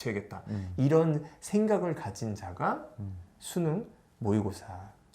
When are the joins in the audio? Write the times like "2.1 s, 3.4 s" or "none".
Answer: none